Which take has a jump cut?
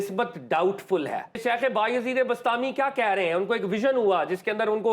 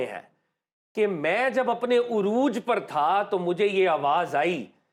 first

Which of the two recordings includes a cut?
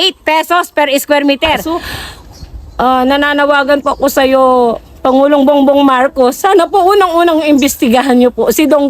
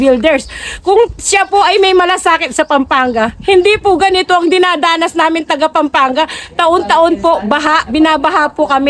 first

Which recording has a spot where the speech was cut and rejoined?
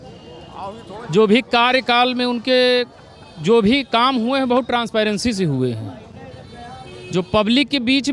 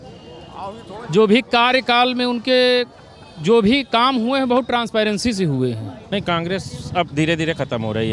second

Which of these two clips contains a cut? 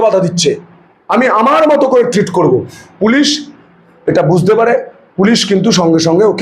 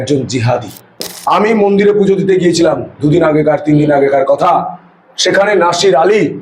second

